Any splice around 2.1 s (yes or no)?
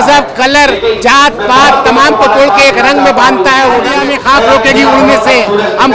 no